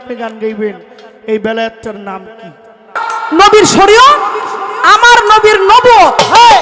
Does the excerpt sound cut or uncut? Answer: cut